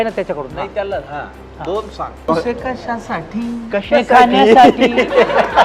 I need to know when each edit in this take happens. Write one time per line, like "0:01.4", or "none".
0:02.3